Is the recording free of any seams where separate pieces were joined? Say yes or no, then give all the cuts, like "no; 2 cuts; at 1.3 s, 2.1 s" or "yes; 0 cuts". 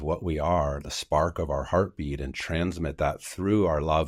yes; 0 cuts